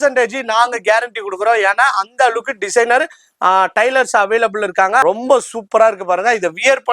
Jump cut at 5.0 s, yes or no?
yes